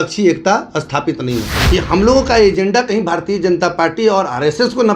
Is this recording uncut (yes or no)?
no